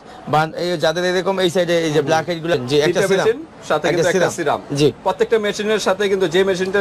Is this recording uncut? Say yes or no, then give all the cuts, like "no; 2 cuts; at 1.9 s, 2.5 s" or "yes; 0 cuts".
no; 1 cut; at 2.5 s